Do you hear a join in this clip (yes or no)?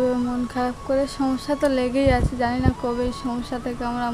no